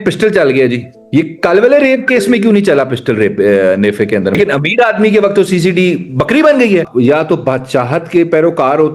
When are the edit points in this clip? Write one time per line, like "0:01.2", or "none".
0:00.9
0:04.3
0:06.9